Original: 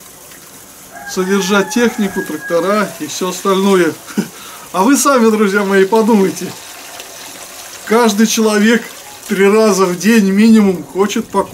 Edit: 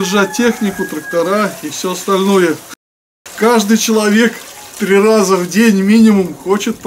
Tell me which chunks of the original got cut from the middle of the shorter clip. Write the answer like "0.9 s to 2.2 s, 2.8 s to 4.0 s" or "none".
4.0 s to 7.2 s